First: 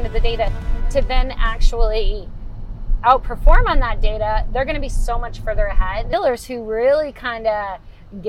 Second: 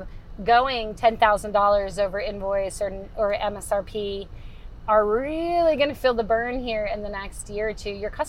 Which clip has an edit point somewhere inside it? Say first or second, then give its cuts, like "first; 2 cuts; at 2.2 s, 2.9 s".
first; 1 cut; at 6.1 s